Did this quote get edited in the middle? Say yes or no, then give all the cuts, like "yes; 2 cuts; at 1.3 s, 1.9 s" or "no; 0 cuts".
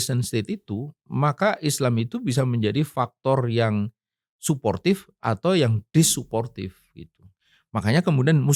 no; 0 cuts